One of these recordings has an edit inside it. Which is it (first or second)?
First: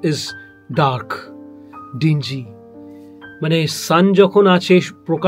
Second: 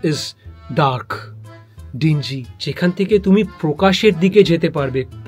second